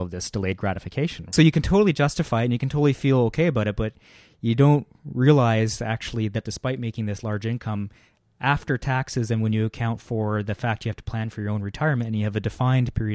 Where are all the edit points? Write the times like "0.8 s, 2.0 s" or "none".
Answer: 1.3 s